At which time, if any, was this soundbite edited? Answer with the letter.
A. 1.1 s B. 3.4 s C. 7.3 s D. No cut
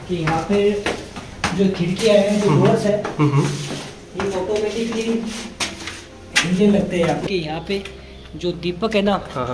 C